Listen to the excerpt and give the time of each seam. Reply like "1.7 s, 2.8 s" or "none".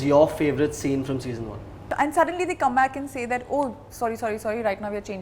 1.8 s

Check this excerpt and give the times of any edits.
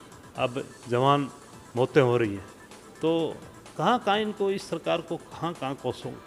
none

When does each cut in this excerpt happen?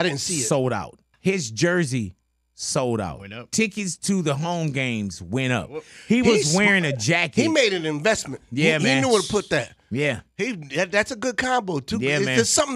1.0 s

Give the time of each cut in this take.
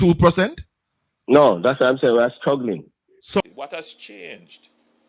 3.4 s

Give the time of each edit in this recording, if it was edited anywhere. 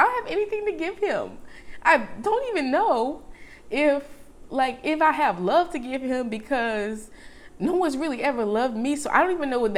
none

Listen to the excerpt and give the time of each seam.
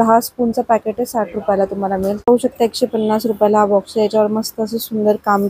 2.2 s

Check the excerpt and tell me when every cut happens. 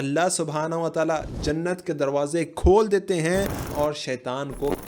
3.7 s

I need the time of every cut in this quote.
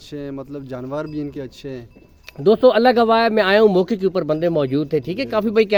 none

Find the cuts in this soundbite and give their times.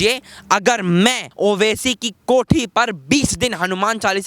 1.3 s

